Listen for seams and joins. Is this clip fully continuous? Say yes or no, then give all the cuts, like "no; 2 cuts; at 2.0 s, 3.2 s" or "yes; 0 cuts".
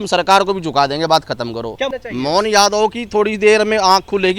no; 1 cut; at 1.9 s